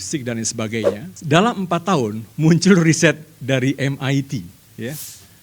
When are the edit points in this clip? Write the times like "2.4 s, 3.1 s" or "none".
1.1 s